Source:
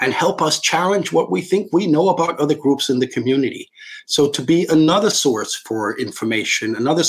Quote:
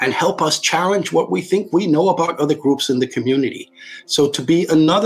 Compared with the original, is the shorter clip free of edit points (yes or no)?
yes